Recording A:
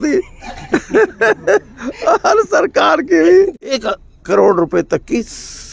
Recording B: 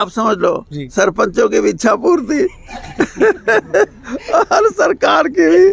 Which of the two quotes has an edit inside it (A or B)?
A